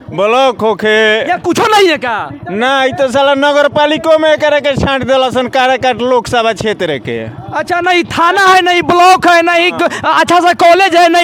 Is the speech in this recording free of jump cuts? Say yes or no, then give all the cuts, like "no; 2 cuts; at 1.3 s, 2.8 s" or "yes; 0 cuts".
yes; 0 cuts